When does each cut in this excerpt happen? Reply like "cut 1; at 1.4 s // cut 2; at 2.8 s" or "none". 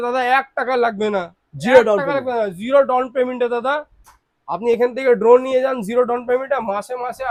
none